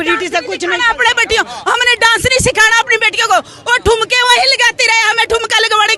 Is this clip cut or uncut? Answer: uncut